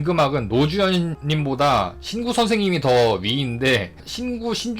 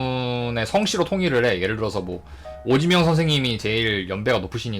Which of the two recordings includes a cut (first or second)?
first